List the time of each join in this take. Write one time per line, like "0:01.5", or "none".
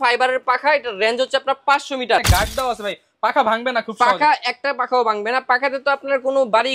0:02.3